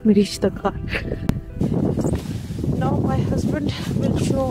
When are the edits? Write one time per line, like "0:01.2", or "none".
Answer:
0:01.6